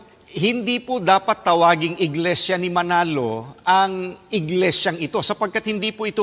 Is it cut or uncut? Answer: uncut